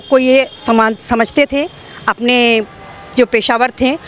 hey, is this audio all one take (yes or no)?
yes